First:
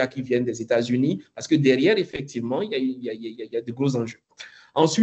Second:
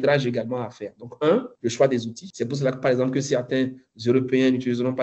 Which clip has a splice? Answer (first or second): second